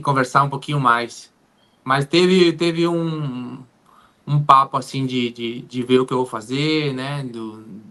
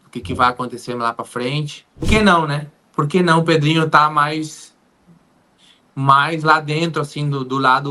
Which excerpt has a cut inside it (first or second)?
second